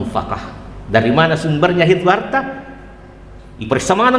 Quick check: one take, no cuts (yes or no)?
yes